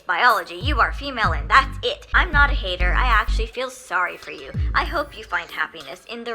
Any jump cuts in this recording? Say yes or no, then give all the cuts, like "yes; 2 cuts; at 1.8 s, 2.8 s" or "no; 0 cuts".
yes; 1 cut; at 2.0 s